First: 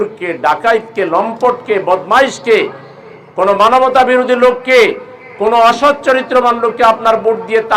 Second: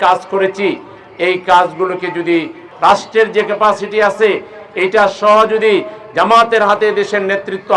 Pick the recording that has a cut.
second; 1 cut; at 2.6 s

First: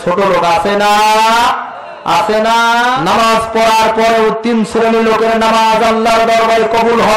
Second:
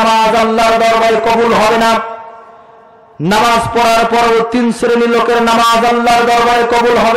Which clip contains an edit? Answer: first; 1 cut; at 3.0 s

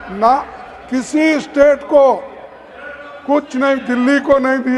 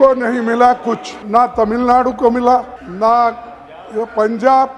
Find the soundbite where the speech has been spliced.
second; 2 cuts; at 1.1 s, 2.8 s

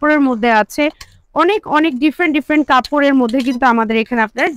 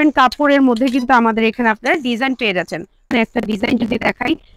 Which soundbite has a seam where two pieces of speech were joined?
second; 1 cut; at 3.0 s

